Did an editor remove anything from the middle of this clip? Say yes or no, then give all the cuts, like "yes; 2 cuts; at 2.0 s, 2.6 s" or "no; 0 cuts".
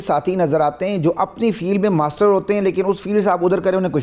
no; 0 cuts